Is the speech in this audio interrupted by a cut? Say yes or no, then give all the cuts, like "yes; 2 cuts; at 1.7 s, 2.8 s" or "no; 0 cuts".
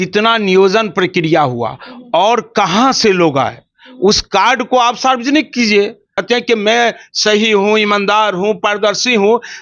yes; 1 cut; at 6.1 s